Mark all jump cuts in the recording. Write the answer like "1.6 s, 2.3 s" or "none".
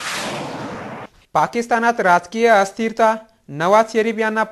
1.2 s